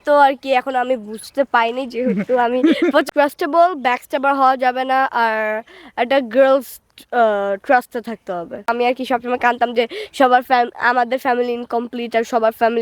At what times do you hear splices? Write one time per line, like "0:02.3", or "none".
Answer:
0:03.1
0:08.7